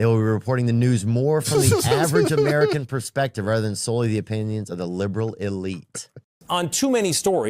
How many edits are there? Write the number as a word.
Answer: one